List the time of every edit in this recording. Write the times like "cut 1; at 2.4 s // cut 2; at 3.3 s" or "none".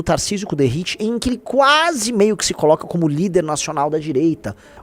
none